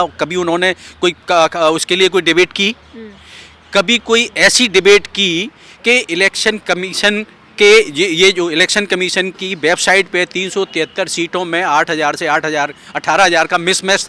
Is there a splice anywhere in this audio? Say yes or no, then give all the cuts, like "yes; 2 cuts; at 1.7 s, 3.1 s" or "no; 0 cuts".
no; 0 cuts